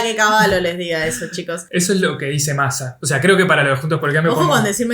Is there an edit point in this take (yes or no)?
yes